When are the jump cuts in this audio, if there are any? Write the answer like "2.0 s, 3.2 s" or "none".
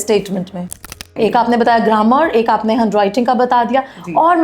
1.0 s